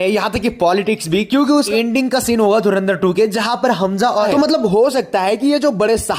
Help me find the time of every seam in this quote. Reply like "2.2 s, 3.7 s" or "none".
1.7 s, 4.3 s